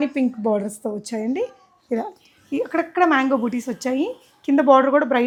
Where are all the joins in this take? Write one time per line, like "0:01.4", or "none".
none